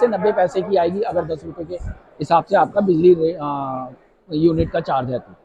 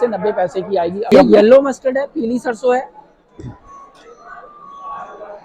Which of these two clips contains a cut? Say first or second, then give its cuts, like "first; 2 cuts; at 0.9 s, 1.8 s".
second; 1 cut; at 1.1 s